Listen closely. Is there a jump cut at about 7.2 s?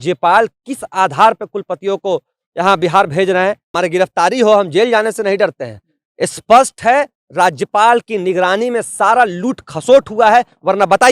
no; 1 cut; at 3.7 s

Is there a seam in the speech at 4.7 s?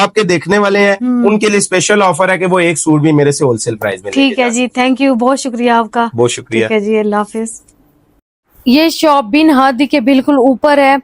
no; 0 cuts

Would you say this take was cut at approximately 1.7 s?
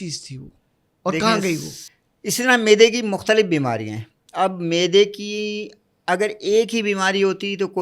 yes; 1 cut; at 1.7 s

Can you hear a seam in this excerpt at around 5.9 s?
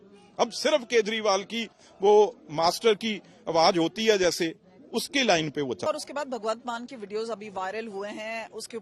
yes; 1 cut; at 5.9 s

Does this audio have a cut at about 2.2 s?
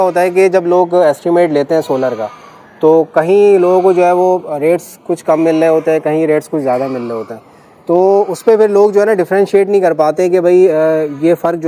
no; 0 cuts

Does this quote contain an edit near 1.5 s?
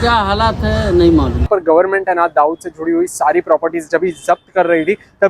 yes; 1 cut; at 1.5 s

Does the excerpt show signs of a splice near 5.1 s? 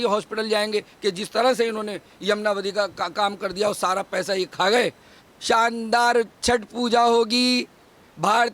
yes; 1 cut; at 5.1 s

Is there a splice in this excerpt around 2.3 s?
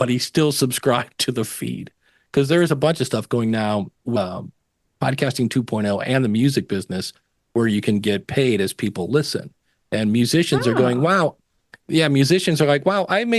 no; 1 cut; at 4.2 s

